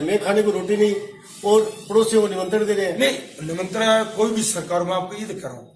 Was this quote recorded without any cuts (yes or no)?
yes